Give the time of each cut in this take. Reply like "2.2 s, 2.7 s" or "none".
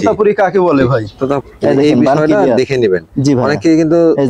1.4 s